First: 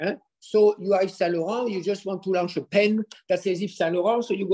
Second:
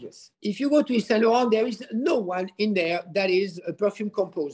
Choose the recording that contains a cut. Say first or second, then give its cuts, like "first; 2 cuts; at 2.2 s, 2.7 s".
second; 1 cut; at 3.6 s